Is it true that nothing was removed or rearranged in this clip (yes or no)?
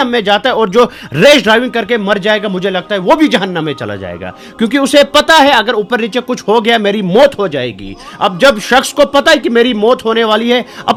yes